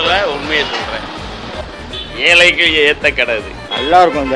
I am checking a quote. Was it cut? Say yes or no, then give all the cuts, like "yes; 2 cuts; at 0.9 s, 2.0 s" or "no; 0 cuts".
yes; 1 cut; at 1.6 s